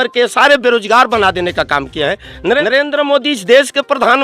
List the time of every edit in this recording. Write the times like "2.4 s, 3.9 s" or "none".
2.6 s